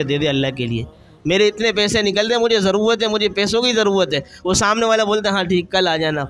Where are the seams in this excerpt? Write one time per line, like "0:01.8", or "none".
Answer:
none